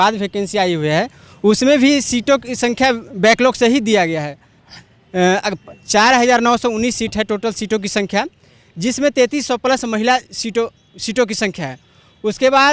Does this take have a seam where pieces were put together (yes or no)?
no